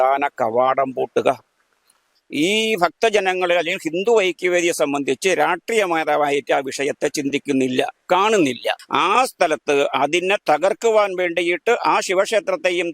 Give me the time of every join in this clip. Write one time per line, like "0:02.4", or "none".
0:02.0
0:08.8

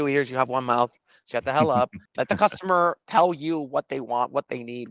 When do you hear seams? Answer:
0:02.0

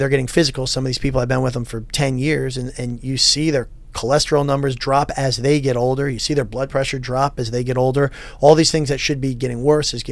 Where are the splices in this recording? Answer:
none

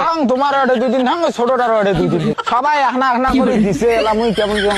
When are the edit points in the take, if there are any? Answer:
0:02.3

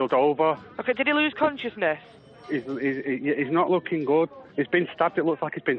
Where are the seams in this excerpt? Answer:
0:04.4

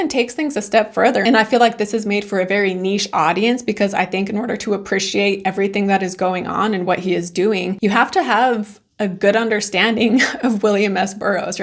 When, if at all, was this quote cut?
none

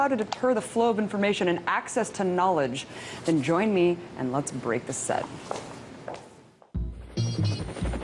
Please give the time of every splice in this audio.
none

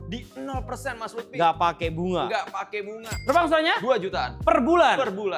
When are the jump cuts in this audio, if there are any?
0:03.1

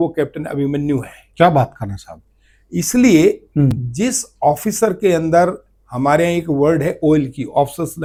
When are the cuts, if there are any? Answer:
none

